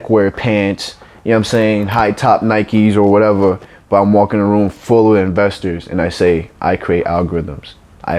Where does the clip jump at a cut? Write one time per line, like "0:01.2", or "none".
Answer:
none